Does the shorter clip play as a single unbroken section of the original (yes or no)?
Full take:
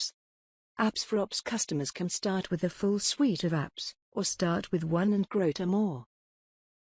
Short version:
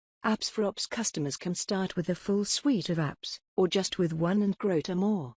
no